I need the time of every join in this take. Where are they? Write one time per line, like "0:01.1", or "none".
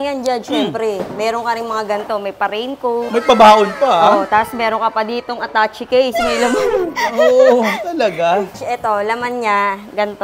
0:08.6